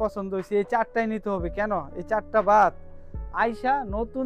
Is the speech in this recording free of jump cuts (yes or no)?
yes